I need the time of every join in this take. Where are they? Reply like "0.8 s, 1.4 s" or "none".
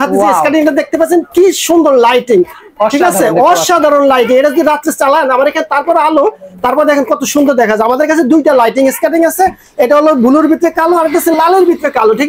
none